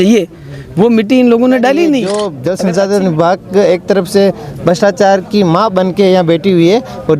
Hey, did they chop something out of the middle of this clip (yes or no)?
yes